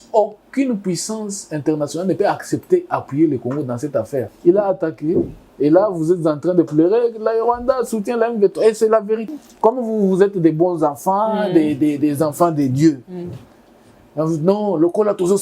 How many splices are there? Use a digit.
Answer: 2